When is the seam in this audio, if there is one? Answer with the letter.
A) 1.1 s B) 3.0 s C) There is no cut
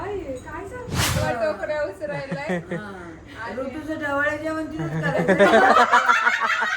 A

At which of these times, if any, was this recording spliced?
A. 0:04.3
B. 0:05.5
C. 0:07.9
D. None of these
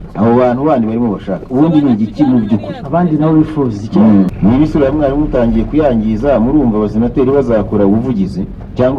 A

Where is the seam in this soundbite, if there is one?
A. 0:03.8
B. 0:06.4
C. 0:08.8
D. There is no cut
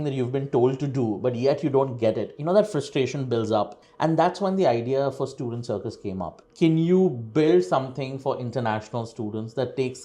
B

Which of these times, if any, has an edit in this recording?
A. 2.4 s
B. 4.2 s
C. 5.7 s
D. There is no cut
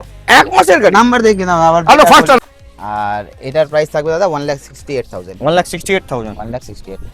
A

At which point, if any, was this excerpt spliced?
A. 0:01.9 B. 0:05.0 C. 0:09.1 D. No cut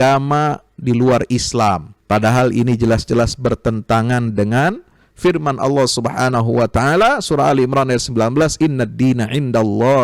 A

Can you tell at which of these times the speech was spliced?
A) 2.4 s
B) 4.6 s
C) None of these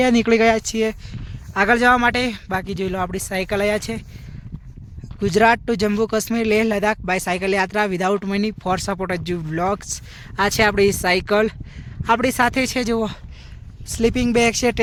C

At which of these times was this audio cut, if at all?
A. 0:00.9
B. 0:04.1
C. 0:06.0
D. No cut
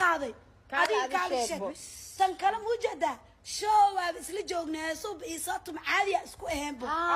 C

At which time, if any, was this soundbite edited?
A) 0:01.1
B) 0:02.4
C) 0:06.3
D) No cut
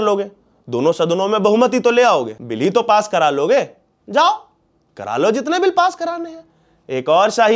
B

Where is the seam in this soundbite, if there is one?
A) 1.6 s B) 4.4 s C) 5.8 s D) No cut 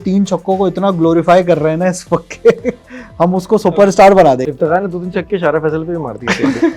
B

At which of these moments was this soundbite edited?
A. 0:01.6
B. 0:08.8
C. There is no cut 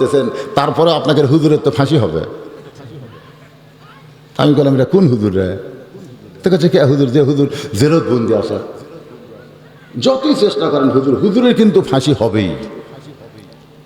C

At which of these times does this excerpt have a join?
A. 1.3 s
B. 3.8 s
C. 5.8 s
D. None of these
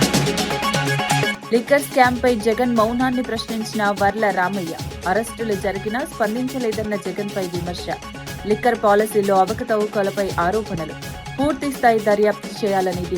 A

